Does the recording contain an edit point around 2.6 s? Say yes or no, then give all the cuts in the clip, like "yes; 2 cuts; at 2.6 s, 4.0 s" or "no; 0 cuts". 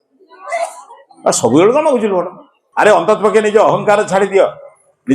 yes; 1 cut; at 2.6 s